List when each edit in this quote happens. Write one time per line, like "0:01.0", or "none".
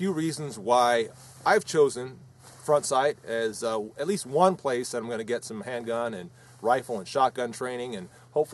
none